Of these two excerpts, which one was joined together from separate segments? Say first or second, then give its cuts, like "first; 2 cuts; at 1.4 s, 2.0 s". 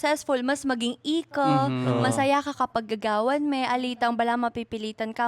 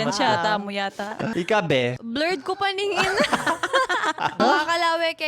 second; 3 cuts; at 1.3 s, 2.0 s, 4.4 s